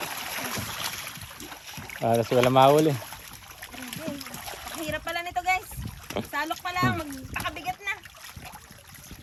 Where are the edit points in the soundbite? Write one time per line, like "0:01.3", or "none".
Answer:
none